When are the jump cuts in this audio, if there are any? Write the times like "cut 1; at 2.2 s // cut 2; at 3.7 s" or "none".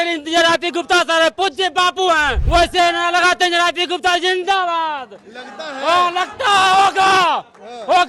cut 1; at 2.3 s